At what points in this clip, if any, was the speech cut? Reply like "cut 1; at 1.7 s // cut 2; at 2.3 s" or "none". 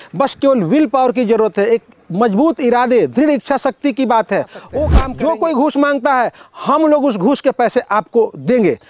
cut 1; at 4.9 s